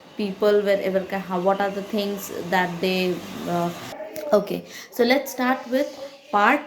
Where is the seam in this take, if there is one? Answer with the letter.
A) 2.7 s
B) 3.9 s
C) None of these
B